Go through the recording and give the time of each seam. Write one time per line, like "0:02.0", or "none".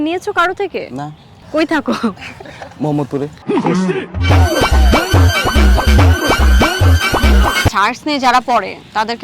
0:01.3
0:07.7